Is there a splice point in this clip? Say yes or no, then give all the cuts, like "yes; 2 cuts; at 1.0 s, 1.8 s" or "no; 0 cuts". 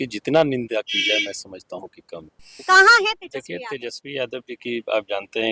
yes; 1 cut; at 2.5 s